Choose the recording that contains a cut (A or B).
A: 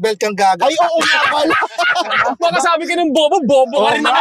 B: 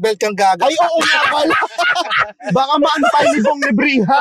A